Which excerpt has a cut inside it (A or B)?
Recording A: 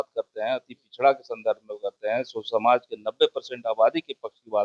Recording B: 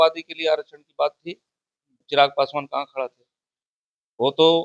B